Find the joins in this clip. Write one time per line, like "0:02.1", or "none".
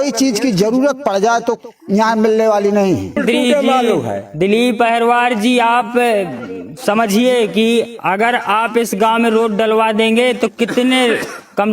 0:03.2